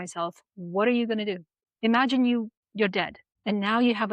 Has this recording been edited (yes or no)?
yes